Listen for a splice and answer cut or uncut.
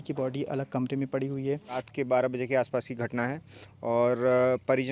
cut